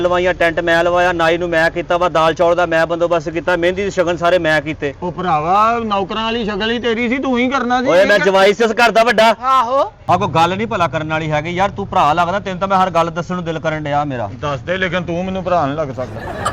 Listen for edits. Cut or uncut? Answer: cut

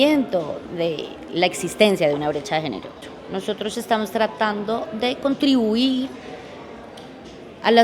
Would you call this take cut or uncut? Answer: cut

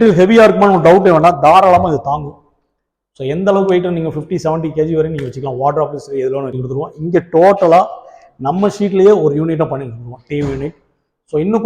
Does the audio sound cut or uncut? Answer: cut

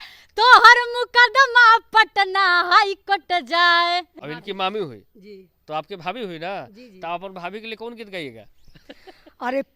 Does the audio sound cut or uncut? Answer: cut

